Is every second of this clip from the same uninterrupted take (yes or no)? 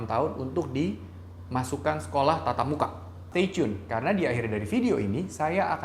no